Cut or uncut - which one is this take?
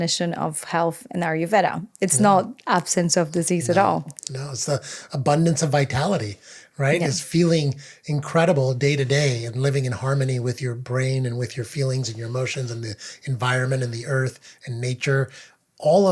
uncut